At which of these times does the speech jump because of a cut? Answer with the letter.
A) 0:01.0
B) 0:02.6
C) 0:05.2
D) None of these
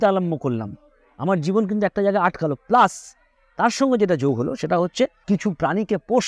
C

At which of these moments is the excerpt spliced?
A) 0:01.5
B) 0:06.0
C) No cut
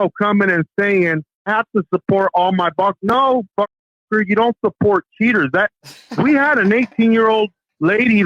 A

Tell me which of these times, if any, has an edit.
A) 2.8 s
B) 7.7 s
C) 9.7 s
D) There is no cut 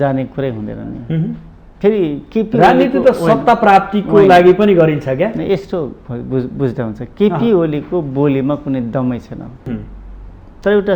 C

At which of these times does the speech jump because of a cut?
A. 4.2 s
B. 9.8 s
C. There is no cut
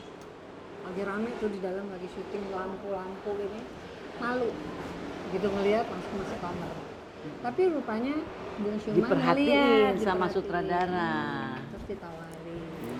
C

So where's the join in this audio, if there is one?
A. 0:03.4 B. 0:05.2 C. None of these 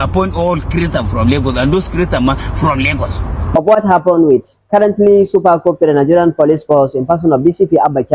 A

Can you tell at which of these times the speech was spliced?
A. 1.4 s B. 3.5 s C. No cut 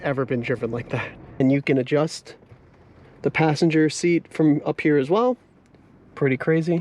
A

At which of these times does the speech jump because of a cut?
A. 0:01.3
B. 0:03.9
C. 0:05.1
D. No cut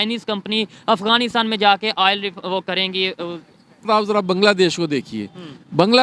B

